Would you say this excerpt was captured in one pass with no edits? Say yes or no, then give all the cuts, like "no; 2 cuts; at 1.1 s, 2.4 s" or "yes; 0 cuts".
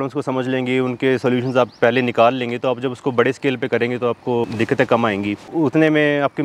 no; 2 cuts; at 4.4 s, 5.4 s